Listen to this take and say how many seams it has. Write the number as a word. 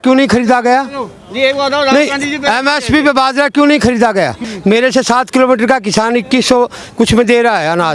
one